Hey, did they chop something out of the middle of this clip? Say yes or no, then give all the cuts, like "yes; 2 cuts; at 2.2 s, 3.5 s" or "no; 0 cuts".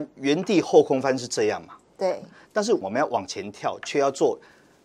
yes; 1 cut; at 2.8 s